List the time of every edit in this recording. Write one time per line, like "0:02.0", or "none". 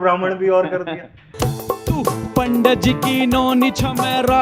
0:01.2